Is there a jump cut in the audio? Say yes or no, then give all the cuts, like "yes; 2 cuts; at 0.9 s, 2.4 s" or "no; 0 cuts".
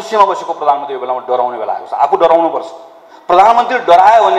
no; 0 cuts